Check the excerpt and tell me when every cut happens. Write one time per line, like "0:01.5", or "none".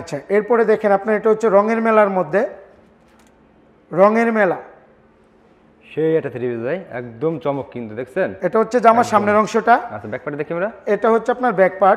none

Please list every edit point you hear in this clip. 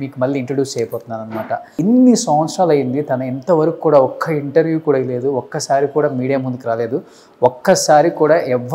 0:01.7

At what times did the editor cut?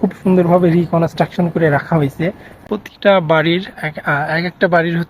0:02.5

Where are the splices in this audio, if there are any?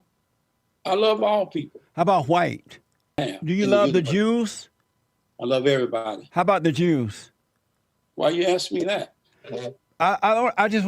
0:03.3

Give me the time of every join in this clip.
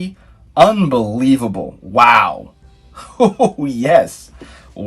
none

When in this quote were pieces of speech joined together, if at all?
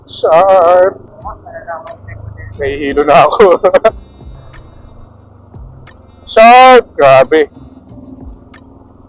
0:01.1
0:04.3

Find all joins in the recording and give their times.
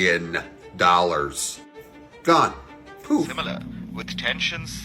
0:03.3

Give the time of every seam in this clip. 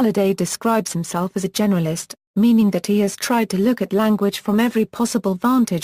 0:04.0

